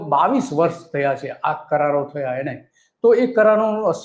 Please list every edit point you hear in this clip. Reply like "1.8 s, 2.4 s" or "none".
none